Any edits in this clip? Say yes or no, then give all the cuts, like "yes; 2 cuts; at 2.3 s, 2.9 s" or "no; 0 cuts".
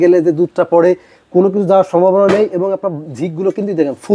no; 0 cuts